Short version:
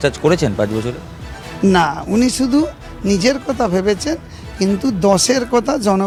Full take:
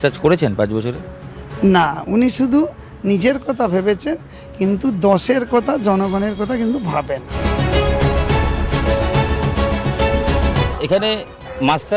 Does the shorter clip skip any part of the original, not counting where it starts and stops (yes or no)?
no